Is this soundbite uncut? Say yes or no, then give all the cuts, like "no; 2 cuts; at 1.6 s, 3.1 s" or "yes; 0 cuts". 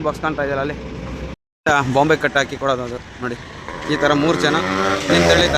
no; 1 cut; at 1.4 s